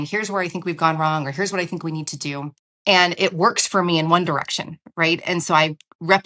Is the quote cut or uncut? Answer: cut